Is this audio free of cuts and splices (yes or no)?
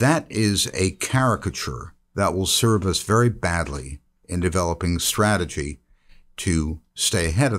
yes